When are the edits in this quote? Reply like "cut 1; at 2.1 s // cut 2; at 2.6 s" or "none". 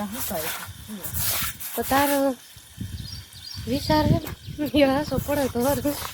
none